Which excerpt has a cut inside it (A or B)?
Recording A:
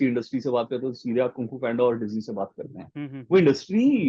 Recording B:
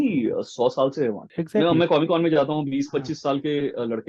B